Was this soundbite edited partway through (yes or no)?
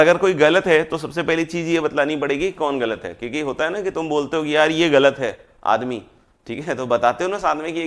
no